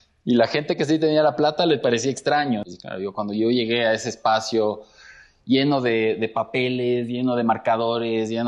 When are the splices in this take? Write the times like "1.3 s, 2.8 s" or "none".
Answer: 2.7 s